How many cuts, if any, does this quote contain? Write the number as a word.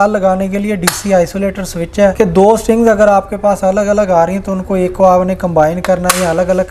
one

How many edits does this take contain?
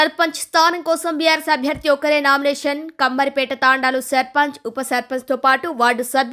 zero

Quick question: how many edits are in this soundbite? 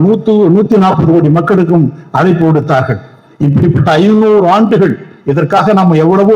zero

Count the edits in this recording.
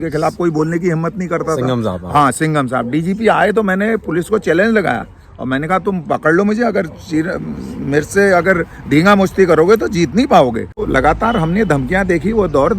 one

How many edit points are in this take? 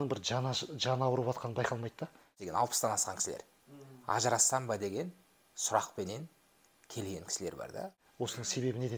two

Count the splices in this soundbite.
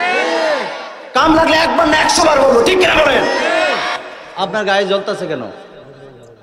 one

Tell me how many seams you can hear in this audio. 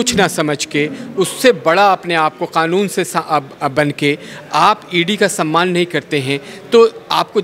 zero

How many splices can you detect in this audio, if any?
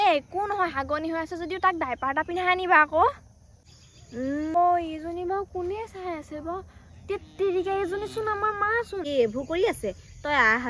two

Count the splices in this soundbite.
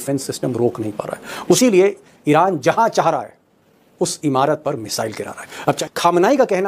two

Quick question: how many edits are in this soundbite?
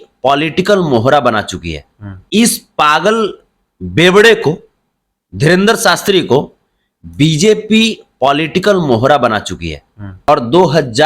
two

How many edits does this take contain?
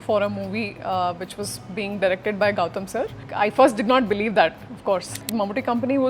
two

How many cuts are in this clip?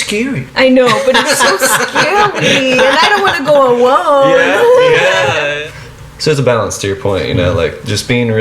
one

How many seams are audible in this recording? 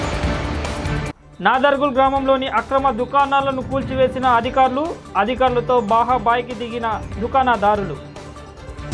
one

